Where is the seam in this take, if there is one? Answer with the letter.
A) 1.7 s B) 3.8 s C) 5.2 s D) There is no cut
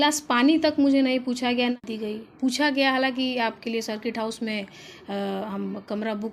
A